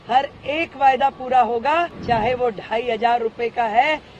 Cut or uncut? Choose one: cut